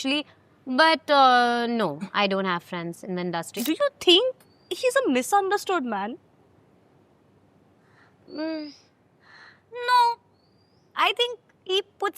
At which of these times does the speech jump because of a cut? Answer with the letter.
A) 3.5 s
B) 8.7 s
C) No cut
A